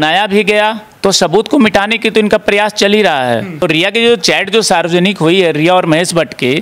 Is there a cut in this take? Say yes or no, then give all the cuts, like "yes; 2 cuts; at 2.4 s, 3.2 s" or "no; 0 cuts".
yes; 2 cuts; at 0.9 s, 3.6 s